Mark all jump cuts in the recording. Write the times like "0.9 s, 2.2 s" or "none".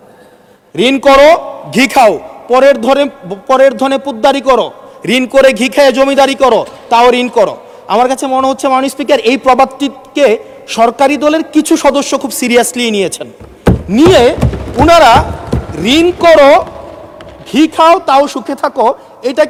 none